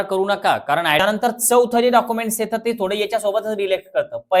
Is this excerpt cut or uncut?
cut